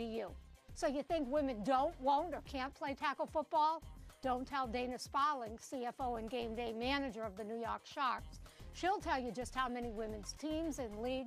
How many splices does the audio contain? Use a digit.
1